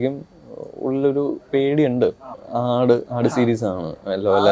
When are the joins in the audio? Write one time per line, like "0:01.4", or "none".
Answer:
0:02.4